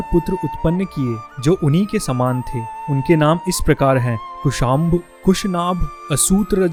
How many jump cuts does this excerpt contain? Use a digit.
0